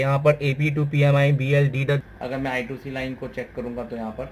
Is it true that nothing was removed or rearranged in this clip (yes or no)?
no